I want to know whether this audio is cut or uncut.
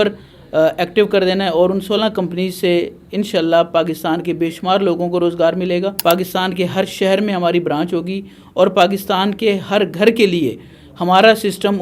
cut